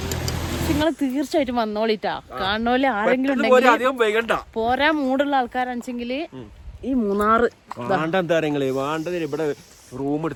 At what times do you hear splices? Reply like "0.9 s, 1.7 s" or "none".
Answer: none